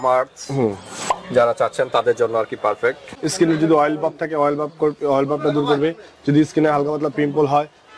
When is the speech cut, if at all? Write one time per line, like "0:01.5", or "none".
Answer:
0:03.1